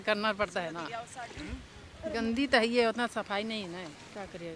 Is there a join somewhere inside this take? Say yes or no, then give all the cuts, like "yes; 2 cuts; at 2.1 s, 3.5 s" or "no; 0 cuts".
no; 0 cuts